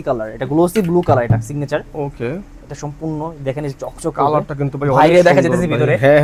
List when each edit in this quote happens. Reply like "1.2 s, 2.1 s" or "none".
none